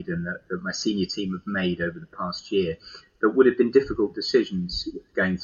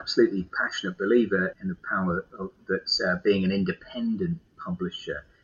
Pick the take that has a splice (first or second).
second